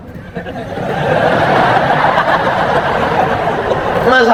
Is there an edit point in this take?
no; 0 cuts

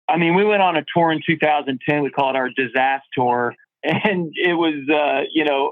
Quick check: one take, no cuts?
yes; 0 cuts

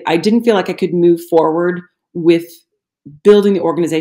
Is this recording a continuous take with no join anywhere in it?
yes; 0 cuts

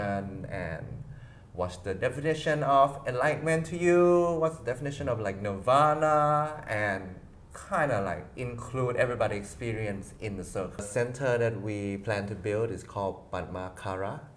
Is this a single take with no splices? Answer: no; 1 cut; at 10.8 s

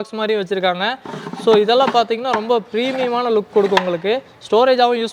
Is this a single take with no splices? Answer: yes; 0 cuts

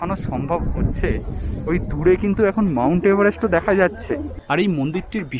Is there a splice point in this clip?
yes; 1 cut; at 4.3 s

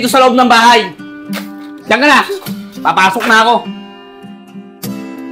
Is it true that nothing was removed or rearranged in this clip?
yes; 0 cuts

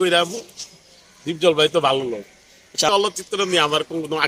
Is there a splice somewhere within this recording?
yes; 1 cut; at 2.9 s

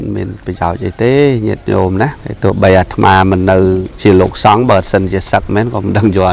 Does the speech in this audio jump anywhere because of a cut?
yes; 2 cuts; at 2.2 s, 3.9 s

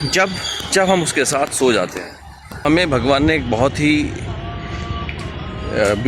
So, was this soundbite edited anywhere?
yes; 1 cut; at 2.5 s

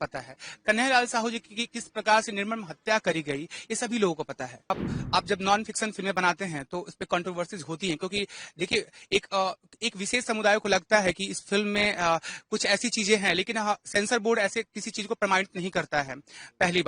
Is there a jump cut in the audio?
yes; 1 cut; at 4.7 s

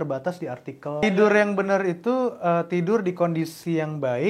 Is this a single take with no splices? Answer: no; 1 cut; at 1.0 s

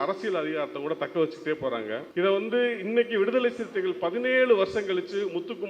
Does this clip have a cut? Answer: yes; 1 cut; at 2.0 s

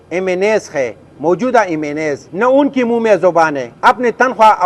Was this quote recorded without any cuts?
no; 2 cuts; at 2.2 s, 3.6 s

